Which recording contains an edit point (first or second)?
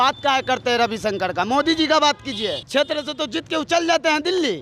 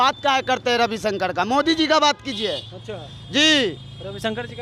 first